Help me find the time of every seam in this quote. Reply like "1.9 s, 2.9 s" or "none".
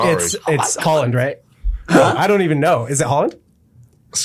none